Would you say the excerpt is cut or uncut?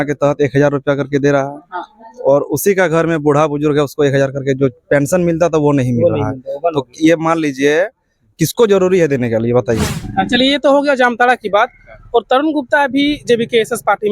cut